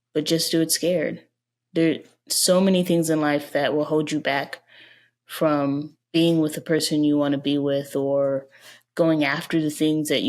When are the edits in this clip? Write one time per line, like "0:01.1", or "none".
none

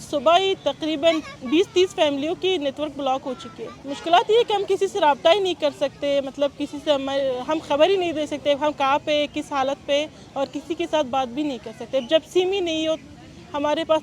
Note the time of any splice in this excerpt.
none

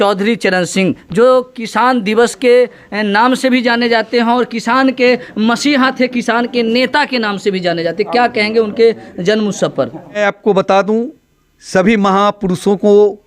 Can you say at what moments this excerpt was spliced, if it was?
0:10.2

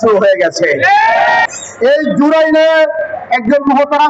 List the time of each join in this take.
0:01.5

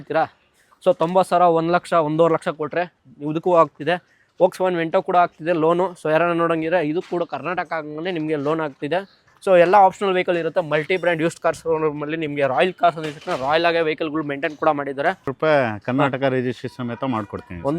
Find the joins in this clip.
0:15.2

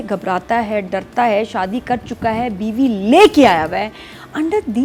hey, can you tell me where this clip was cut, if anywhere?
none

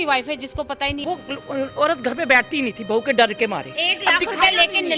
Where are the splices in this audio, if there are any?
0:01.0
0:03.8

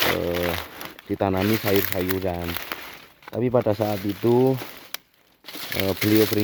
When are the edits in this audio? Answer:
none

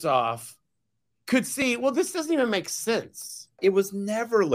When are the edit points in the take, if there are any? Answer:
0:03.6

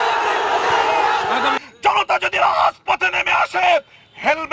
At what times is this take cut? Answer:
0:01.6

